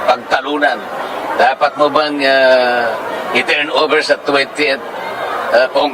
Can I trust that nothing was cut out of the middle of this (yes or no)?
yes